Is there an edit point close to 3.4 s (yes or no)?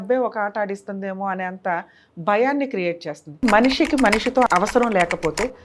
yes